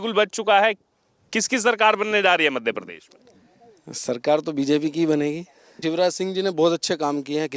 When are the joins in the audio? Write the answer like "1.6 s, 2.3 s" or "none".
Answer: 5.8 s